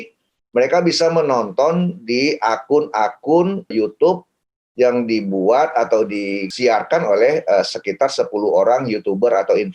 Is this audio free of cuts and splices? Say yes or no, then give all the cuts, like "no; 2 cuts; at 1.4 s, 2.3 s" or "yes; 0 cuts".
no; 2 cuts; at 3.7 s, 6.4 s